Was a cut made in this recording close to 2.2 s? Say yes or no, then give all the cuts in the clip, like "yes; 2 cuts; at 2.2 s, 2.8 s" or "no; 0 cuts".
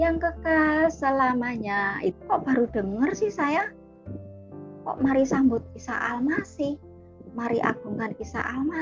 yes; 1 cut; at 2.2 s